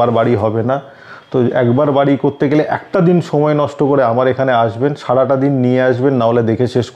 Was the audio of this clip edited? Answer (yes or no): no